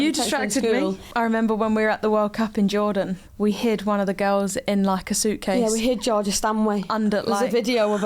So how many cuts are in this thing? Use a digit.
2